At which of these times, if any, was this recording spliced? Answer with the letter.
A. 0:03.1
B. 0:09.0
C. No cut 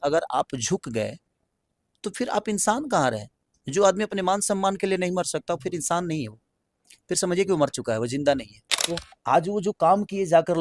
B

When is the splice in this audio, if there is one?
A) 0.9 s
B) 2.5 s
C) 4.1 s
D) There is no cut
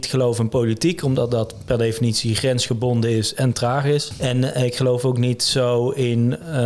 C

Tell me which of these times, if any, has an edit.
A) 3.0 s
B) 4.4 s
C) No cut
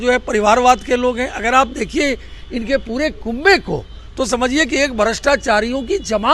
C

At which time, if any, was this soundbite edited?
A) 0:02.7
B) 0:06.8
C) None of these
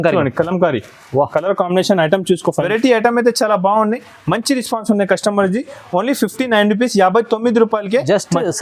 A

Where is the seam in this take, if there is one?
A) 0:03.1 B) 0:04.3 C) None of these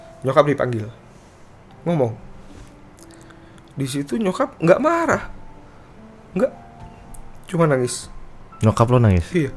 C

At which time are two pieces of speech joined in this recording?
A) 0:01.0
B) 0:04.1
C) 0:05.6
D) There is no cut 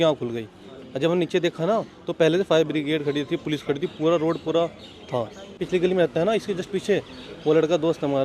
C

